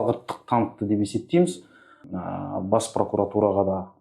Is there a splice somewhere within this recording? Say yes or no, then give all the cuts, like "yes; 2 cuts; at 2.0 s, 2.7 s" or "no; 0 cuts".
yes; 1 cut; at 2.0 s